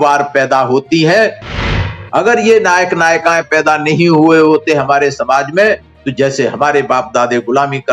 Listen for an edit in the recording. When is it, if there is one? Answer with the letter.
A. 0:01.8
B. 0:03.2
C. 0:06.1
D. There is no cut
A